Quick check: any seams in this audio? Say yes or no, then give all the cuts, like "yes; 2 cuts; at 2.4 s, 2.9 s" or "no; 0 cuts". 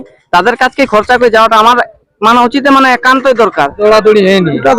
yes; 1 cut; at 3.8 s